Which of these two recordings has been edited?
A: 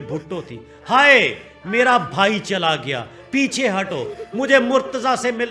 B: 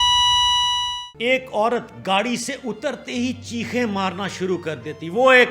B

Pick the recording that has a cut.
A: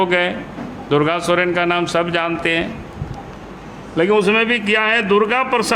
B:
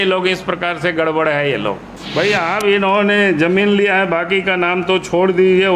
B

